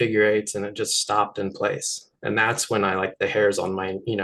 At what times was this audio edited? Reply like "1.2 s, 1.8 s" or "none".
none